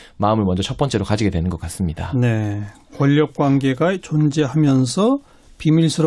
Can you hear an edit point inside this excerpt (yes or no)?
yes